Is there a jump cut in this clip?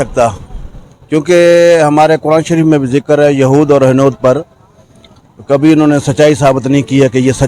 no; 0 cuts

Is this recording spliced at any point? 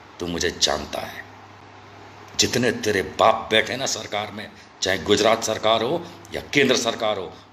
no; 0 cuts

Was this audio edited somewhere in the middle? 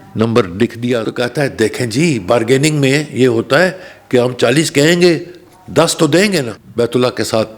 yes; 2 cuts; at 1.0 s, 6.6 s

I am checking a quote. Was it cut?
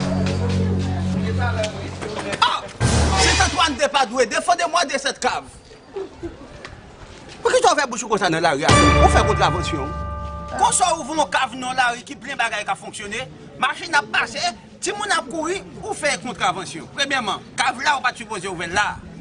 yes; 1 cut; at 1.4 s

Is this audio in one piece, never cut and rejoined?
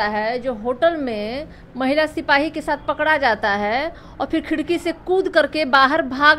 yes; 0 cuts

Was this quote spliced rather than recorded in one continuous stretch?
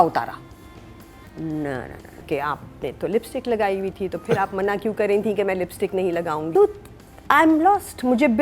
yes; 2 cuts; at 2.2 s, 6.5 s

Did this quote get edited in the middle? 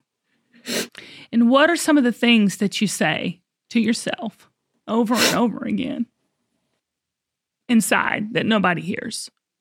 no; 0 cuts

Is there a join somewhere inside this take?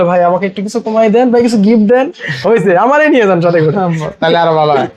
no; 0 cuts

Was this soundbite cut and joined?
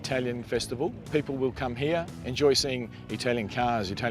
yes; 2 cuts; at 1.0 s, 2.2 s

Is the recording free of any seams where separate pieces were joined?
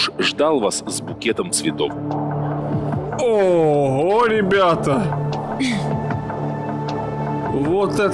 yes; 0 cuts

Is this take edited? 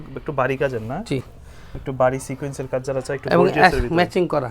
no; 0 cuts

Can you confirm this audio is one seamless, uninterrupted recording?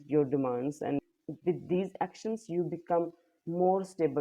no; 1 cut; at 1.0 s

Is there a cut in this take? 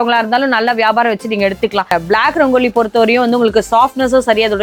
yes; 1 cut; at 1.9 s

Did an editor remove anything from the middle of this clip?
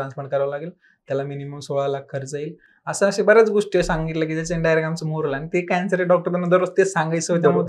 no; 0 cuts

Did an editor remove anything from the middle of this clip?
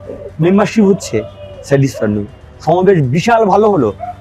no; 0 cuts

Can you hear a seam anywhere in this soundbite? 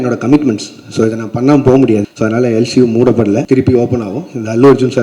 yes; 2 cuts; at 2.1 s, 3.4 s

